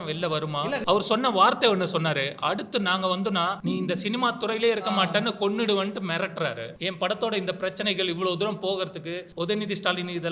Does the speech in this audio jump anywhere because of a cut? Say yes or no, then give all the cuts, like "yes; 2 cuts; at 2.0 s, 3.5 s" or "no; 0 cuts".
yes; 4 cuts; at 0.8 s, 3.6 s, 6.7 s, 9.2 s